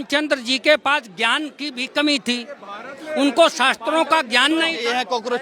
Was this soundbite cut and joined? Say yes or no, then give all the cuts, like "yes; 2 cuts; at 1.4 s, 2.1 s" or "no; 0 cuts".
no; 0 cuts